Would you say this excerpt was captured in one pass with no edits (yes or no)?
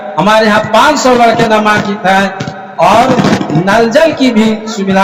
yes